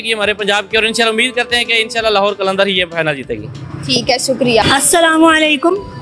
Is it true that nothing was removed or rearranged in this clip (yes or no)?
yes